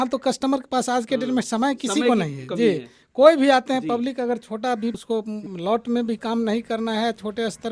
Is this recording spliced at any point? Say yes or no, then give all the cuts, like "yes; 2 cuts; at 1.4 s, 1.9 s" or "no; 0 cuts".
no; 0 cuts